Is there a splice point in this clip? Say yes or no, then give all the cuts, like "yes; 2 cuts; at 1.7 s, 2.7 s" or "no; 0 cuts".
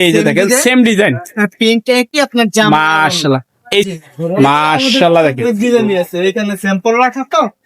yes; 1 cut; at 3.9 s